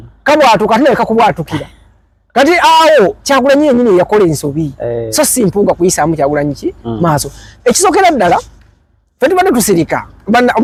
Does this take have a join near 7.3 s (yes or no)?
no